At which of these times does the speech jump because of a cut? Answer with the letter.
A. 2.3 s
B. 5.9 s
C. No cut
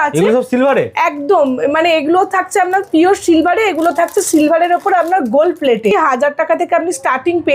B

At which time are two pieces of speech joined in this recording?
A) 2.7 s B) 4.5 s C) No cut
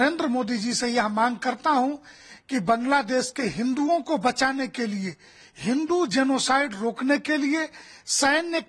C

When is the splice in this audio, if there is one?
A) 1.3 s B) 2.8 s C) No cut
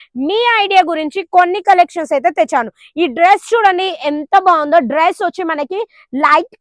C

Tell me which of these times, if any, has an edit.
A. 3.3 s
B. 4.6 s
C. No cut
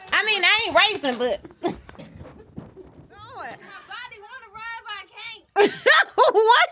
A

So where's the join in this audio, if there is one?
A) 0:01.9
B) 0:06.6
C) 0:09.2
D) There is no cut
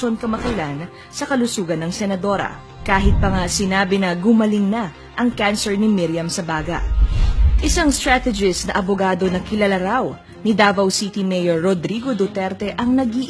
A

